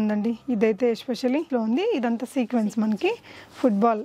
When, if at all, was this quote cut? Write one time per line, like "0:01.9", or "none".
0:01.5